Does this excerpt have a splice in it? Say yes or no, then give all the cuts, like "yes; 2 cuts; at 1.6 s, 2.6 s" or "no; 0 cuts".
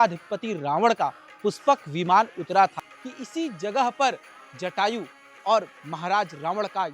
yes; 1 cut; at 2.9 s